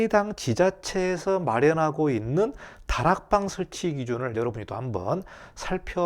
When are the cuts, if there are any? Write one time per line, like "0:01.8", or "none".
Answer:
none